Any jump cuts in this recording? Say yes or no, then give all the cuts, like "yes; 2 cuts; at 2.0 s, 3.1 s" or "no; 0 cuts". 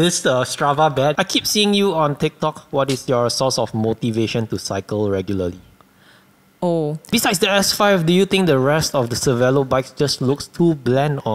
yes; 2 cuts; at 1.2 s, 7.1 s